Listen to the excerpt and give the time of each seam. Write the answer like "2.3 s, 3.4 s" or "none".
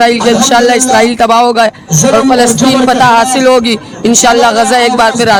none